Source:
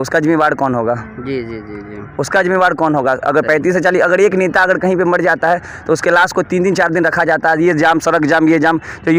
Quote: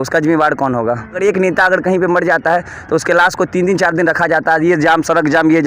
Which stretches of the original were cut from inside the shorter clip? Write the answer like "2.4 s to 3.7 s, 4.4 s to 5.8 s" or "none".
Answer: 1.2 s to 4.2 s